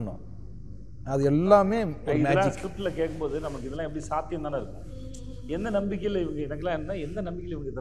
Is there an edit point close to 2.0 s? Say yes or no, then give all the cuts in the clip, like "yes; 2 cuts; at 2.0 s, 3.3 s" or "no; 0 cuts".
no; 0 cuts